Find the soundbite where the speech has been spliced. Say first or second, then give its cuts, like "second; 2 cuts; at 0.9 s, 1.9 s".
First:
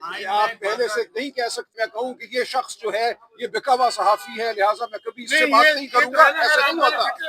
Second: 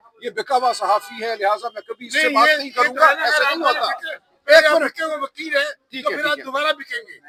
first; 1 cut; at 1.7 s